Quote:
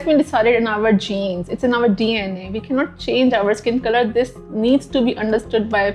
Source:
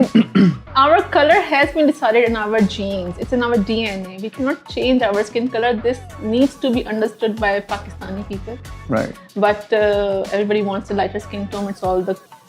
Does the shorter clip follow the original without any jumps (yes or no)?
yes